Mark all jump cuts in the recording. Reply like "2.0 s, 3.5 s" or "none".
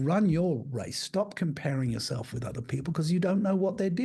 none